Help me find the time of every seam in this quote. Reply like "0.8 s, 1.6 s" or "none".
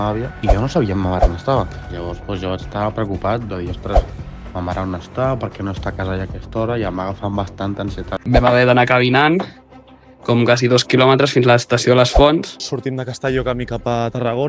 8.1 s, 12.6 s